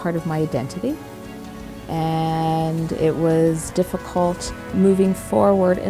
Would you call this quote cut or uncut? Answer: cut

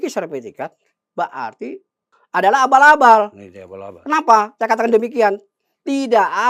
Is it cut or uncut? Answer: uncut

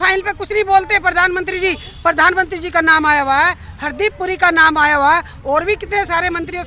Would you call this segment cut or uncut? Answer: uncut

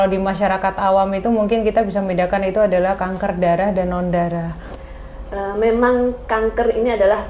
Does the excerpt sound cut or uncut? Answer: cut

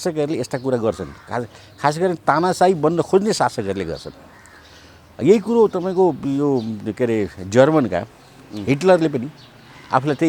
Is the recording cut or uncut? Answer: uncut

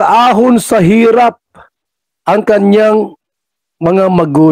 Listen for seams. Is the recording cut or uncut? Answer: uncut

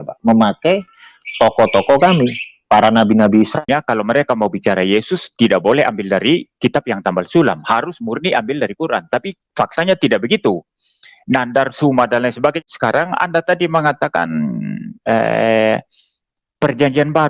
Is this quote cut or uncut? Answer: cut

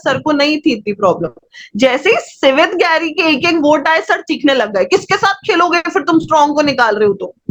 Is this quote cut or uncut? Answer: uncut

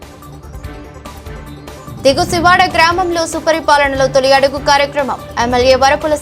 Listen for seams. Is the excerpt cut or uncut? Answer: cut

